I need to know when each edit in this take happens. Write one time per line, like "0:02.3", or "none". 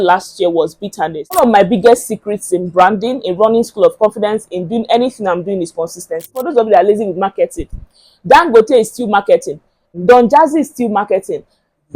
0:01.4
0:06.4